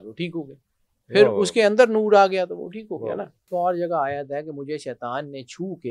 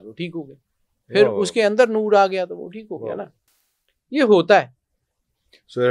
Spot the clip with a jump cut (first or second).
first